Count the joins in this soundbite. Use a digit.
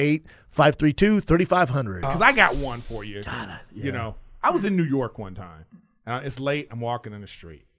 1